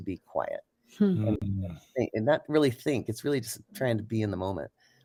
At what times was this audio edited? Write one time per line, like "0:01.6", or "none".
none